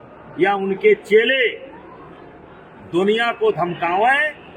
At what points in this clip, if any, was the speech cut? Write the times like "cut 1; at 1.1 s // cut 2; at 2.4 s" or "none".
none

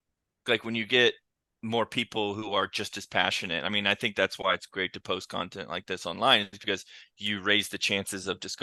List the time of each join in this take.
none

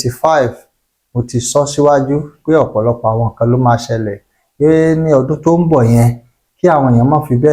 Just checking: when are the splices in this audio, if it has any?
none

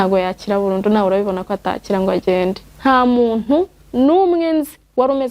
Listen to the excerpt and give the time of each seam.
cut 1; at 2.7 s

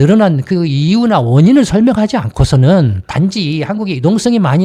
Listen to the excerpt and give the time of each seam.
none

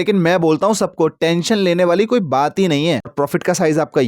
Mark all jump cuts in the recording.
cut 1; at 3.1 s

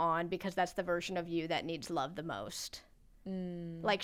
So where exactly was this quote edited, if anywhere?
none

